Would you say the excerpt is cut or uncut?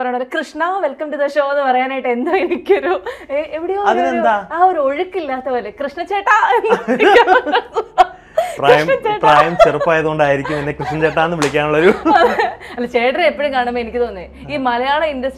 uncut